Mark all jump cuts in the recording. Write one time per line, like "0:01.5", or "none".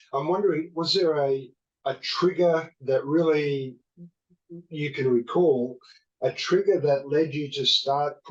none